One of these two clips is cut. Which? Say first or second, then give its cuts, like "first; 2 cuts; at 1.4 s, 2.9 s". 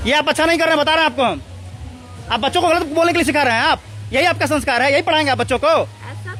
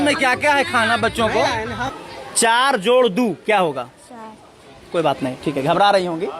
second; 1 cut; at 1.8 s